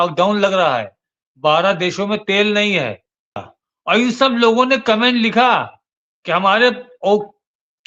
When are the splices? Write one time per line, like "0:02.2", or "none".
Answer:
0:03.4